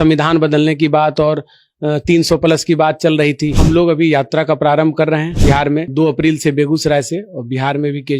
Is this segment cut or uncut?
cut